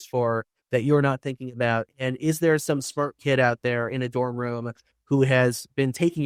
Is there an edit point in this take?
no; 0 cuts

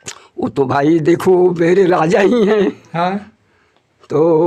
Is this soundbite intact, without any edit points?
yes; 0 cuts

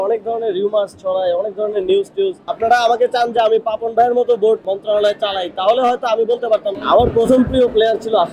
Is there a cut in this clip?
yes; 3 cuts; at 2.4 s, 4.7 s, 6.7 s

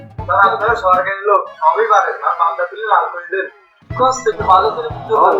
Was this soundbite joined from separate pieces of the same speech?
no; 0 cuts

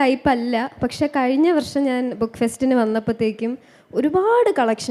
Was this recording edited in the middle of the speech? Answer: no; 0 cuts

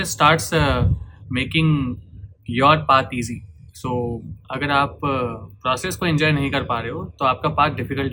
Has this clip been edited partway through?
no; 0 cuts

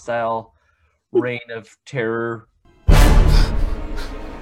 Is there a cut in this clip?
no; 0 cuts

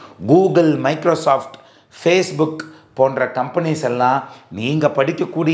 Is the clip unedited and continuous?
yes; 0 cuts

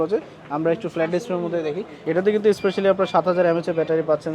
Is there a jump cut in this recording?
yes; 1 cut; at 1.9 s

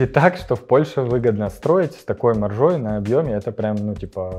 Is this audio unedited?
yes; 0 cuts

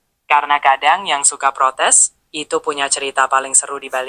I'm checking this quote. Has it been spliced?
no; 0 cuts

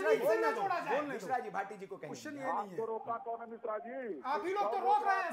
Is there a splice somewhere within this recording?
no; 0 cuts

